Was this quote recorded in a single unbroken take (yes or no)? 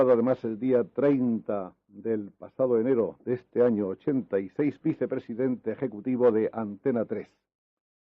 no